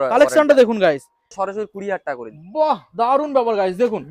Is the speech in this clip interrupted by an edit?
yes; 1 cut; at 1.3 s

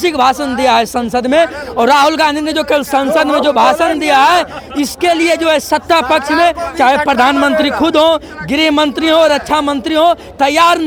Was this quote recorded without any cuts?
yes; 0 cuts

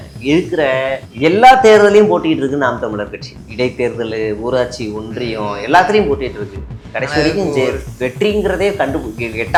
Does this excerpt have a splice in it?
no; 0 cuts

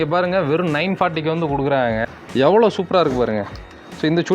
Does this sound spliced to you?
yes; 1 cut; at 2.0 s

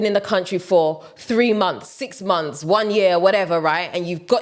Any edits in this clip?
no; 0 cuts

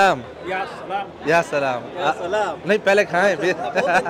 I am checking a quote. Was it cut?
no; 0 cuts

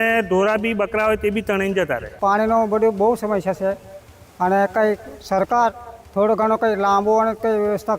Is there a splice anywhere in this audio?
yes; 1 cut; at 2.1 s

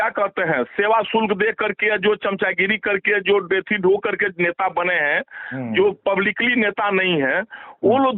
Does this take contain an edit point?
no; 0 cuts

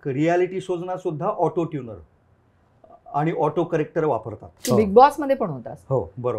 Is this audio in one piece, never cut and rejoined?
no; 1 cut; at 4.5 s

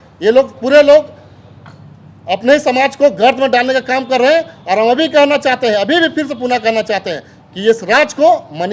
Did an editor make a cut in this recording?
no; 0 cuts

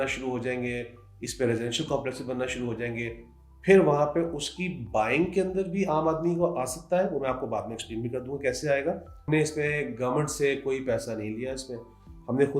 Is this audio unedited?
no; 1 cut; at 9.3 s

